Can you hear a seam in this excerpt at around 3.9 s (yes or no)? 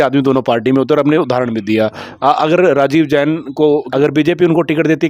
yes